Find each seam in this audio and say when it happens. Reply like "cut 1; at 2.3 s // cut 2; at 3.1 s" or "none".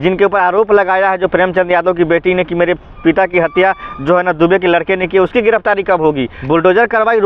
cut 1; at 6.3 s